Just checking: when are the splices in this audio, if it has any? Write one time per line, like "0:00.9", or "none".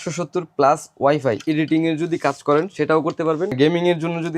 0:01.4
0:03.6